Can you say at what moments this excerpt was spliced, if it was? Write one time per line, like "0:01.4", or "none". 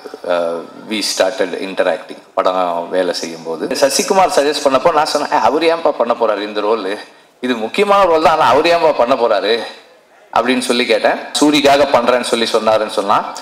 0:03.8
0:11.3